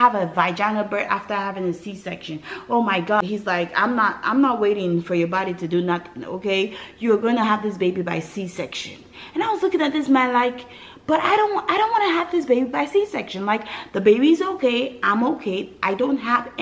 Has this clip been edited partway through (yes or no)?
yes